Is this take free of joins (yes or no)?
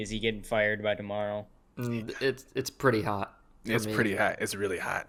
yes